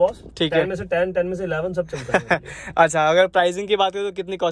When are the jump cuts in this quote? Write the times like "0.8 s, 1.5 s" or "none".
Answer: none